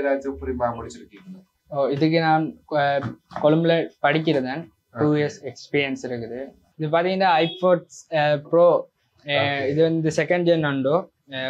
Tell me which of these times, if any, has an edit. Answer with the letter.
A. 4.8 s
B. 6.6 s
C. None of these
B